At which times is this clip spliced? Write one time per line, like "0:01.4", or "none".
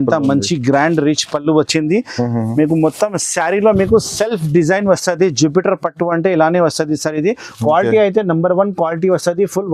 none